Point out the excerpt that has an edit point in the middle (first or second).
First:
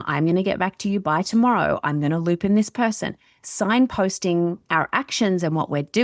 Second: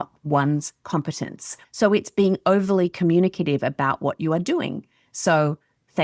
second